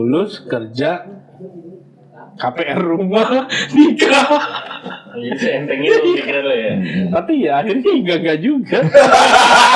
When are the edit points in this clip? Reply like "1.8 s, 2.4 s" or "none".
none